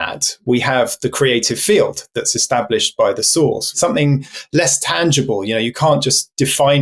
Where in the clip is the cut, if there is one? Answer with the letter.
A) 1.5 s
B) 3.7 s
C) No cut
B